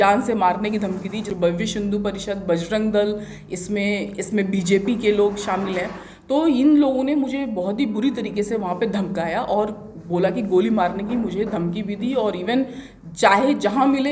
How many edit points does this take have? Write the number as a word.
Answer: one